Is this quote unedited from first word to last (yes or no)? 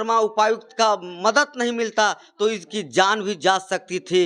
yes